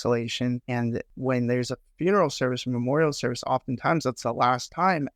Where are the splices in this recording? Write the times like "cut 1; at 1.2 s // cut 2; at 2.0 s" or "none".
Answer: cut 1; at 1.1 s